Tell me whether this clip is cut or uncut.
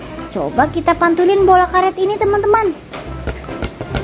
uncut